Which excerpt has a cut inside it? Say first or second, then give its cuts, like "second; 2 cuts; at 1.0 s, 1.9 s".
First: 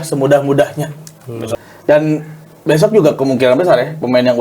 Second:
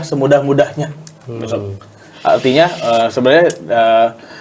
first; 1 cut; at 1.7 s